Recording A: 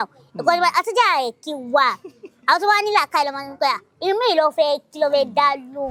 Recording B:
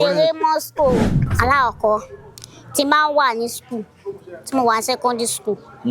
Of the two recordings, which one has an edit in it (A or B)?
B